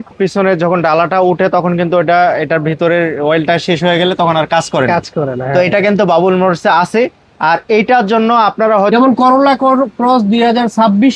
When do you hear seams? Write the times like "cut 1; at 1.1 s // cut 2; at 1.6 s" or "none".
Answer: cut 1; at 8.9 s